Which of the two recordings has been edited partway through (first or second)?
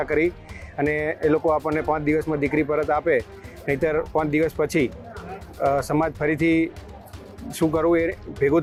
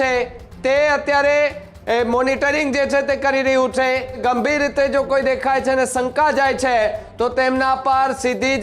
second